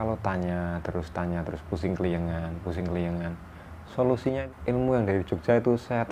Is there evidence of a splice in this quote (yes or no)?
yes